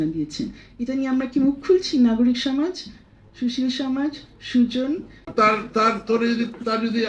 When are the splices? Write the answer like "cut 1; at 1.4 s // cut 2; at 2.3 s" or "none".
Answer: cut 1; at 5.2 s